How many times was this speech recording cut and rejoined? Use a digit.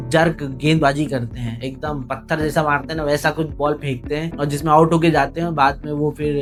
0